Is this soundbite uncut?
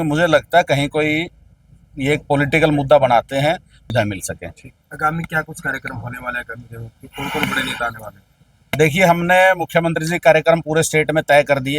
no; 1 cut; at 3.8 s

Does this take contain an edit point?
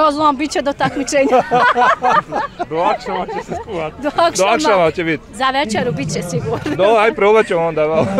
no; 0 cuts

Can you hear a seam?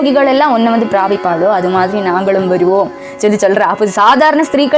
no; 0 cuts

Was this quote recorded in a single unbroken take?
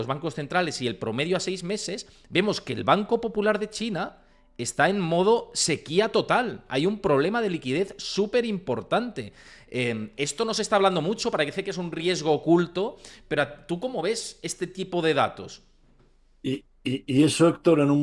yes; 0 cuts

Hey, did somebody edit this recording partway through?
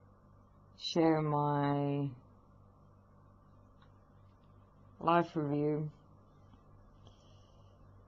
no; 0 cuts

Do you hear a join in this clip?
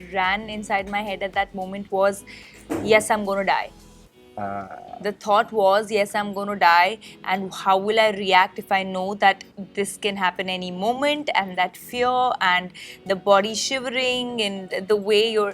no; 0 cuts

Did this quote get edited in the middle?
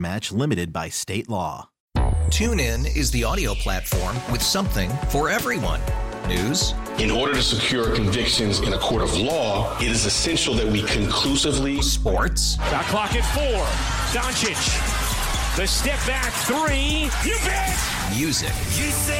yes; 1 cut; at 1.7 s

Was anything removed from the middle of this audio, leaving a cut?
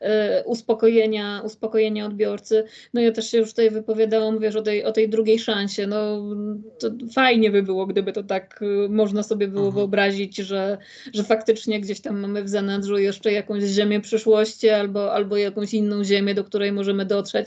no; 0 cuts

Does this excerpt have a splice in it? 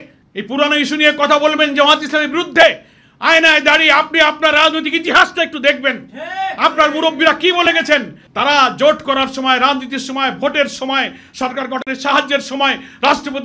no; 0 cuts

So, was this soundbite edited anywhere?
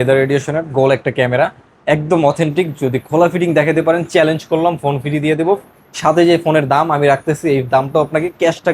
no; 0 cuts

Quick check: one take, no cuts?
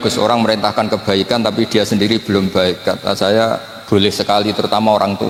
yes; 0 cuts

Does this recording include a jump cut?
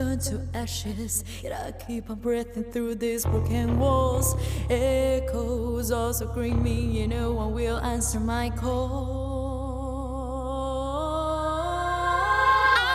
no; 0 cuts

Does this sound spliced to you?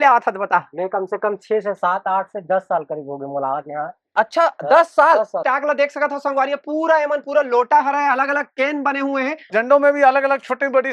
yes; 2 cuts; at 5.4 s, 9.5 s

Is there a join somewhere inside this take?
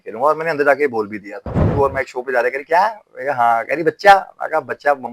yes; 1 cut; at 1.6 s

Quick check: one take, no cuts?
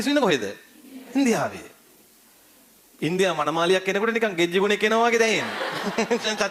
yes; 0 cuts

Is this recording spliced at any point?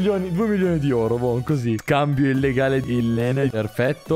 yes; 1 cut; at 1.8 s

